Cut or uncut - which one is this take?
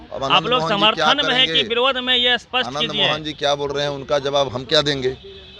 cut